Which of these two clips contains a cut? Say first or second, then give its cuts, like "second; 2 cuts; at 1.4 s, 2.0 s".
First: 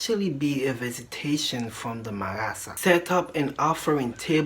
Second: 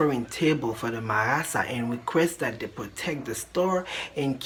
first; 1 cut; at 2.7 s